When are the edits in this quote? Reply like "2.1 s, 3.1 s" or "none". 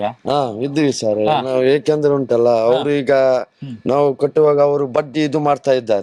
1.6 s